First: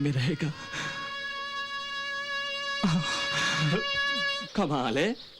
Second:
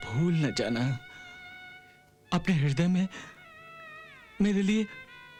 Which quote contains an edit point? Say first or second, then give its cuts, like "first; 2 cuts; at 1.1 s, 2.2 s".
first; 1 cut; at 4.4 s